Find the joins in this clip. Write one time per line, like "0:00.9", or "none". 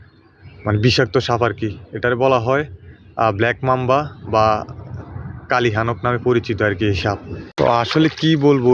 0:07.4